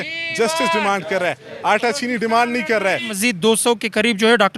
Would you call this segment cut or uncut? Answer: cut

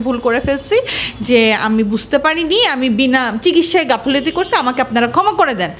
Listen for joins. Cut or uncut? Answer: uncut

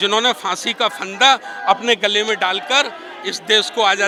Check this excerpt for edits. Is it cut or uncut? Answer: uncut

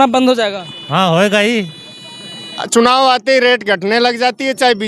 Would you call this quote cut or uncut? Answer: cut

